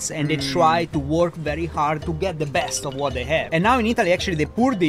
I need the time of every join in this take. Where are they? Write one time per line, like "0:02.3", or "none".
0:02.0
0:03.5